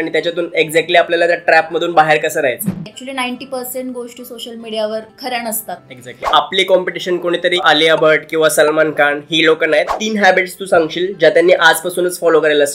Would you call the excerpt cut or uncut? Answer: cut